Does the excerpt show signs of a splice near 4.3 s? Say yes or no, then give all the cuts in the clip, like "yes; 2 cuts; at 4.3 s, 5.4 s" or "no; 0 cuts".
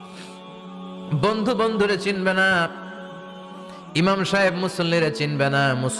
no; 1 cut; at 1.1 s